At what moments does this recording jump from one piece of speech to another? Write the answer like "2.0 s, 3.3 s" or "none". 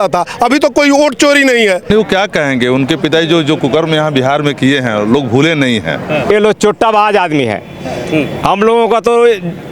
1.8 s, 6.3 s